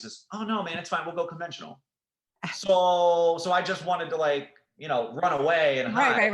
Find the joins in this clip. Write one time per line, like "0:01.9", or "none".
0:01.9